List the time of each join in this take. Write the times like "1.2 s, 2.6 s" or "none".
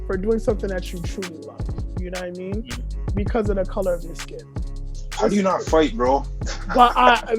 none